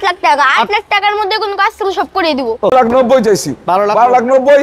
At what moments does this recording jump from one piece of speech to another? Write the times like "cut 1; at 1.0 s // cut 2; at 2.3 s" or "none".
cut 1; at 2.7 s